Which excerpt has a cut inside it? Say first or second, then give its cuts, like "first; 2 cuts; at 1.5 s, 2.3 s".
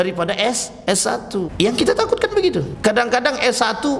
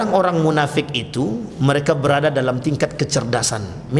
first; 2 cuts; at 1.1 s, 2.7 s